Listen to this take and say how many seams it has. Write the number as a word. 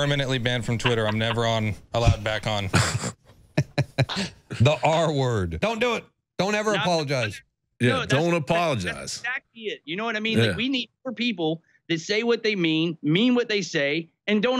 one